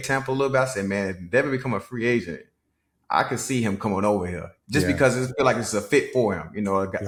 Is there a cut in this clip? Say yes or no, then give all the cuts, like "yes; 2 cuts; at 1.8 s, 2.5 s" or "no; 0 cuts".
no; 0 cuts